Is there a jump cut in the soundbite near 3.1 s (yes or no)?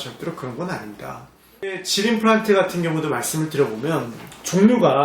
no